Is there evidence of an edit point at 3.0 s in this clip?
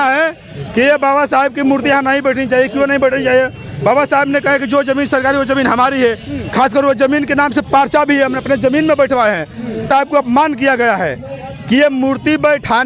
no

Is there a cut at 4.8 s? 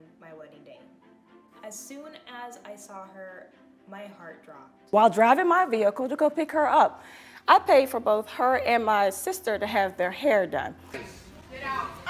yes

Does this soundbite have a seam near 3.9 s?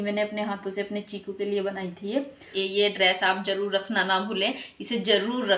no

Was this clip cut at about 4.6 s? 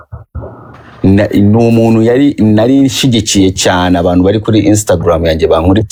no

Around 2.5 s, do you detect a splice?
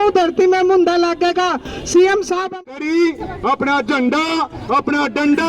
yes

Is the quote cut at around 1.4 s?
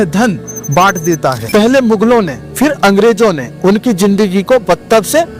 yes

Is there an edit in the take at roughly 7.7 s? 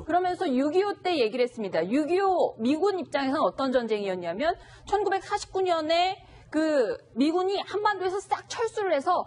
yes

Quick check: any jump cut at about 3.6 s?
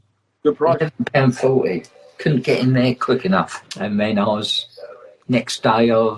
yes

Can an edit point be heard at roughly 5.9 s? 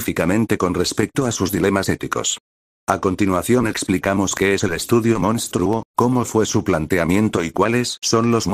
no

